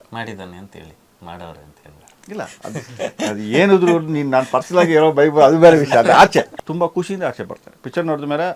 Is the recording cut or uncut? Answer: cut